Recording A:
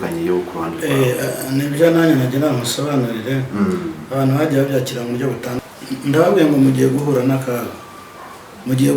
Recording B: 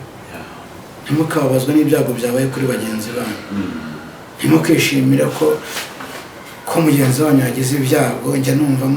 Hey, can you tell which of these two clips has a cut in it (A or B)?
A